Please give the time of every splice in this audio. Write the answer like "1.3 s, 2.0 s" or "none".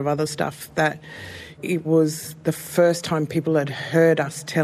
1.5 s